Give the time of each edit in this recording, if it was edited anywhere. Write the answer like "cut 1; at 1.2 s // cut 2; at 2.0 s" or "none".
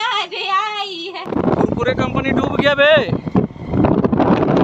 cut 1; at 1.2 s